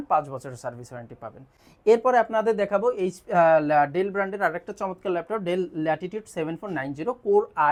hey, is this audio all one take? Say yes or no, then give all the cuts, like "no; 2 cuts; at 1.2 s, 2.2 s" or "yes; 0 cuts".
yes; 0 cuts